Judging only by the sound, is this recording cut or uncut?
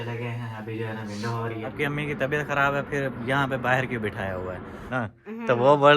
cut